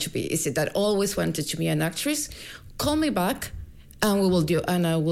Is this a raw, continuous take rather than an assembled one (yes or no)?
yes